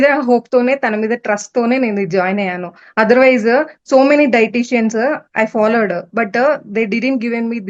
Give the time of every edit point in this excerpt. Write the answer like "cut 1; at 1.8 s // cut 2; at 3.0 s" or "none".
none